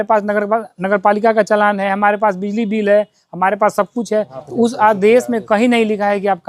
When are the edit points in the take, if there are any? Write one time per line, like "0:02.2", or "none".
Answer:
0:04.4